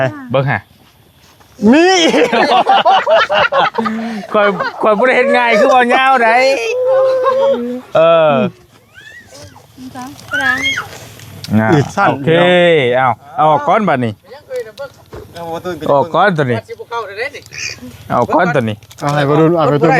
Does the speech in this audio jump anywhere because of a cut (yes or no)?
no